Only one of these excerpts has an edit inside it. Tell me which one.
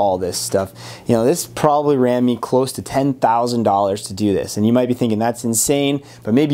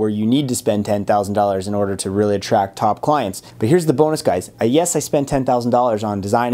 second; 1 cut; at 3.5 s

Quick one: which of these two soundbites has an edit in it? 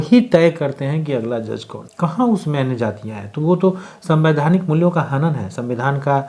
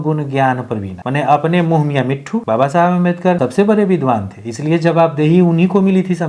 second; 3 cuts; at 1.0 s, 2.4 s, 3.4 s

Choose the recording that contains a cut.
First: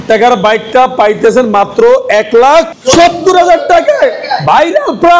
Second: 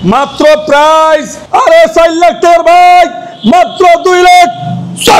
second; 1 cut; at 1.4 s

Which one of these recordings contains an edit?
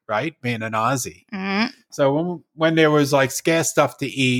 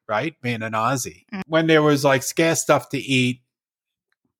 second; 1 cut; at 1.4 s

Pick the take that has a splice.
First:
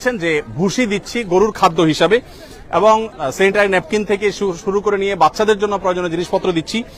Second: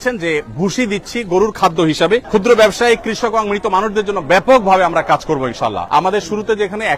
second; 2 cuts; at 2.2 s, 5.8 s

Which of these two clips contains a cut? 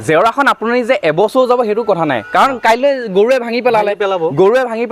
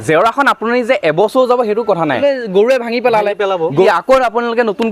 second; 2 cuts; at 2.2 s, 3.9 s

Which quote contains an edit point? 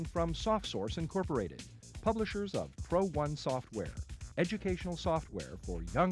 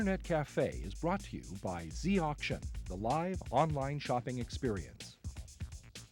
second; 1 cut; at 4.9 s

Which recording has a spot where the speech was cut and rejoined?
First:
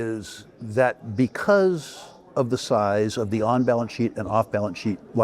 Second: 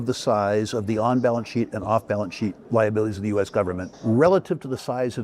second; 1 cut; at 3.9 s

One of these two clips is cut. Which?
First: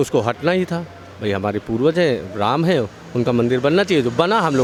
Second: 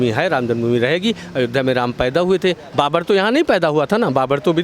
second; 1 cut; at 2.6 s

